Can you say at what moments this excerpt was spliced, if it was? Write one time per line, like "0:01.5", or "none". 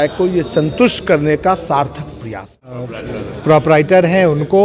0:02.8